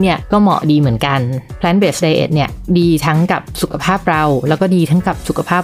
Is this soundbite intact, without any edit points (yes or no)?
no